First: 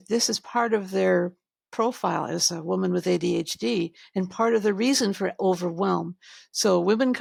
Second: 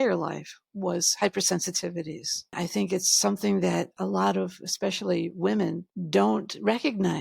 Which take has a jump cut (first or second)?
second